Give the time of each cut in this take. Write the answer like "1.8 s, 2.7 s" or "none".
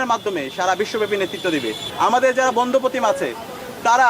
1.8 s